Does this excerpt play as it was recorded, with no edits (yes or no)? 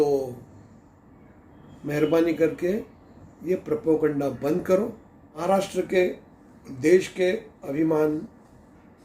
no